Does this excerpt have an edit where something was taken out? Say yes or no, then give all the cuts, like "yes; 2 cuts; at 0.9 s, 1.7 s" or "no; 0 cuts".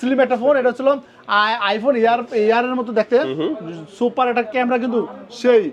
no; 0 cuts